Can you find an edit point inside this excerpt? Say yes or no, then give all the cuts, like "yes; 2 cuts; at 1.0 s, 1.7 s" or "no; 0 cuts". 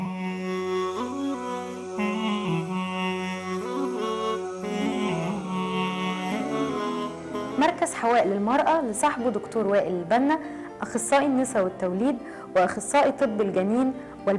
no; 0 cuts